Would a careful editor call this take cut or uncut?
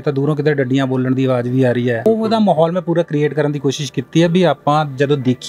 cut